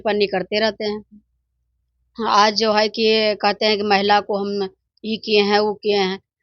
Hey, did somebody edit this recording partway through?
no; 0 cuts

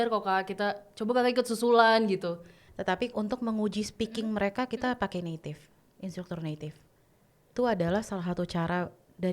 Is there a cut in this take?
yes; 2 cuts; at 2.7 s, 7.5 s

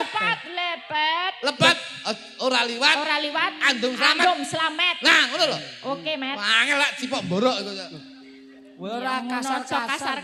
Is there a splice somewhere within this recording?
no; 0 cuts

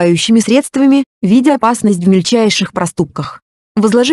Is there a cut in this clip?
yes; 1 cut; at 1.1 s

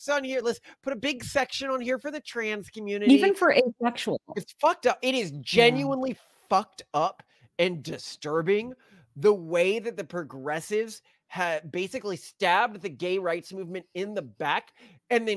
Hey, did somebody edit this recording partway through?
yes; 1 cut; at 4.3 s

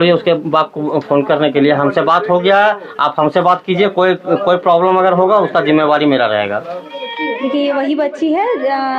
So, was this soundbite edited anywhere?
yes; 1 cut; at 7.1 s

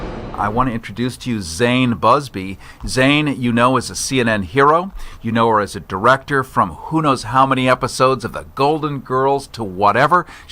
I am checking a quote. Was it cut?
yes; 1 cut; at 1.9 s

